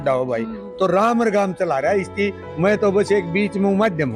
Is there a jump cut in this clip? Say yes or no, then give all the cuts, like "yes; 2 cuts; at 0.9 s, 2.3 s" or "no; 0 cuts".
no; 0 cuts